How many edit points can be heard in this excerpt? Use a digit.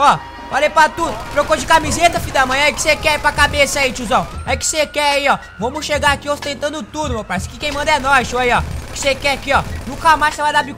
0